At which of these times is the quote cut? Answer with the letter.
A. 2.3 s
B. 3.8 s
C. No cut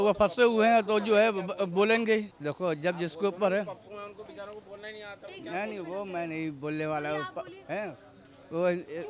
A